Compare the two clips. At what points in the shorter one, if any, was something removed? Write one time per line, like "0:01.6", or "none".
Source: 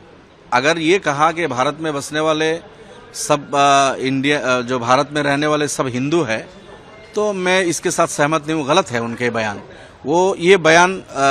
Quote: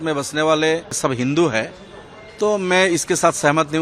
0:01.0